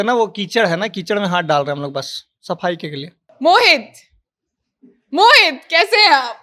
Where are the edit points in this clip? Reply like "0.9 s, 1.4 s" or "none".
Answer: 3.2 s

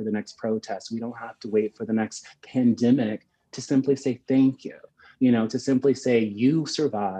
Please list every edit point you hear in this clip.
none

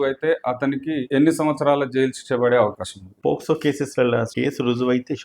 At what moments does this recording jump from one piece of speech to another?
4.3 s

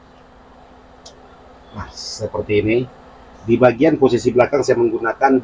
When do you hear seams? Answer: none

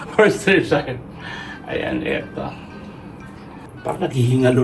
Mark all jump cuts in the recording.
3.6 s

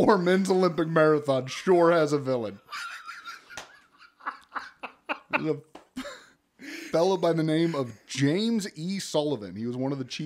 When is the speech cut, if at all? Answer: none

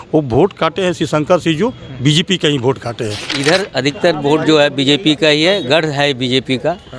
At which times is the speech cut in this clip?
3.3 s

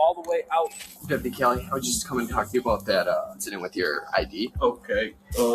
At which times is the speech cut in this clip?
1.0 s, 3.4 s, 4.5 s

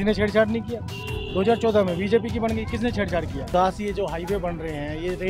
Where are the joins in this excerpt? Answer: 3.4 s

